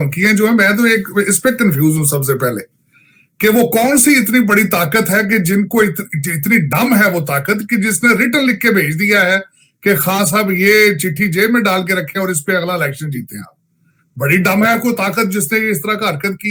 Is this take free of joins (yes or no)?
yes